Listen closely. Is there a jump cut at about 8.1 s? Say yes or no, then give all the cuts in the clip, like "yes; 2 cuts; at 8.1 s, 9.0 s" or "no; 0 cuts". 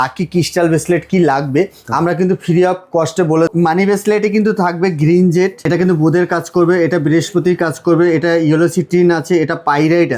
no; 2 cuts; at 3.5 s, 5.6 s